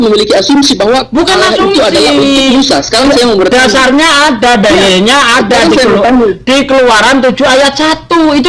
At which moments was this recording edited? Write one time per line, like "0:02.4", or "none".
none